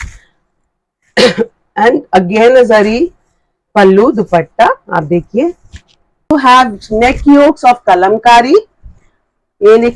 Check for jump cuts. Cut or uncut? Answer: cut